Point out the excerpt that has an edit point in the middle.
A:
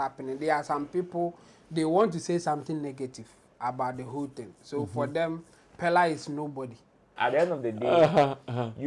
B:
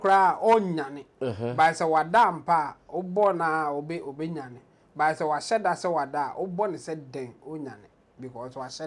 A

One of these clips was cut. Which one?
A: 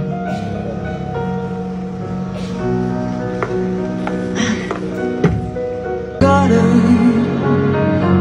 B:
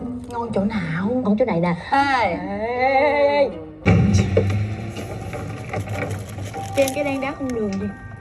B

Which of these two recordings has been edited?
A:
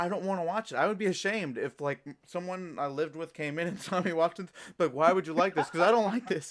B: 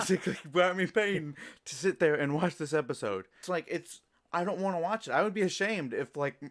B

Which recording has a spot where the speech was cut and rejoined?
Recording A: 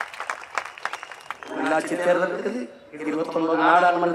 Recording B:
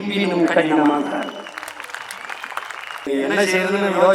B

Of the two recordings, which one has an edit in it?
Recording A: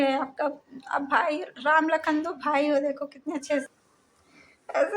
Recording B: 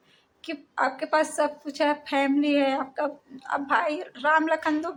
A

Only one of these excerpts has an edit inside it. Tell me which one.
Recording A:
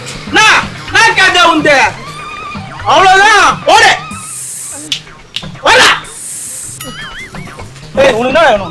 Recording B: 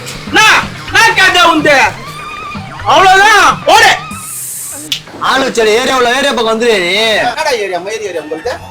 B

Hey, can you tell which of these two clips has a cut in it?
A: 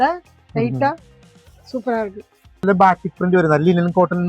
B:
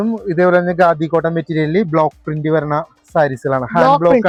A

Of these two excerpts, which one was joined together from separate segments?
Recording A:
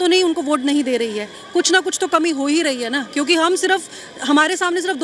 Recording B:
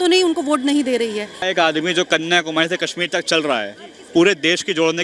B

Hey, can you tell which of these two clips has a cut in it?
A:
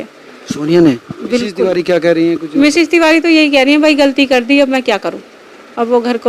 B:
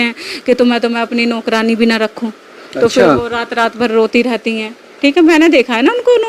A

